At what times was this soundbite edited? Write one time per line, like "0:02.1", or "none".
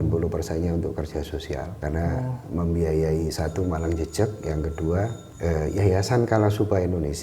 0:01.7
0:05.2